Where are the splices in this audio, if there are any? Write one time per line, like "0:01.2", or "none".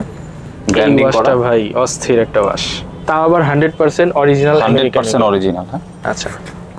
none